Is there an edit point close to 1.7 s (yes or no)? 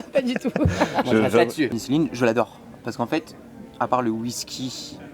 yes